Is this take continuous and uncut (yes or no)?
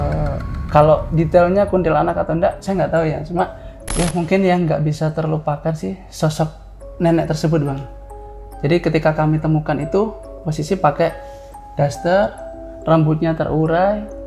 no